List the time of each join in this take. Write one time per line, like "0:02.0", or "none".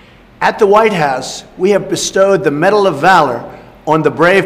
none